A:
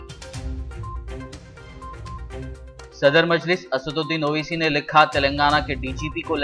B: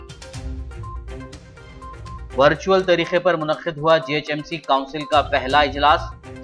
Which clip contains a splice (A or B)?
B